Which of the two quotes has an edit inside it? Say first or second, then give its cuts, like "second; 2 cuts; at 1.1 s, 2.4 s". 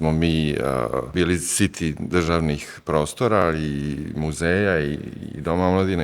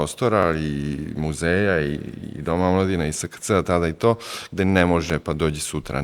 first; 1 cut; at 1.1 s